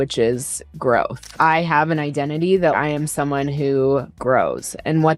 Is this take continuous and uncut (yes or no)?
no